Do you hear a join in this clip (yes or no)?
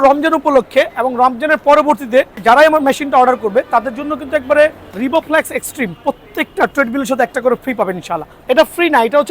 yes